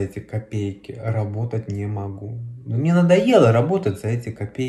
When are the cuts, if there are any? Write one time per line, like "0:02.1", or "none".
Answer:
none